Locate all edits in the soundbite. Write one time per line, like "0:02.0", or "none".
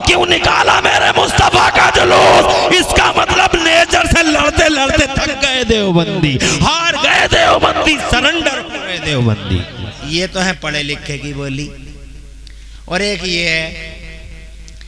0:10.0